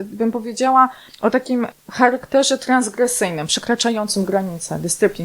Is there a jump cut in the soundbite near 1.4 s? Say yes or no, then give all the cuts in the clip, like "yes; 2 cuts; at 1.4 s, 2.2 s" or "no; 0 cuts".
yes; 1 cut; at 1.4 s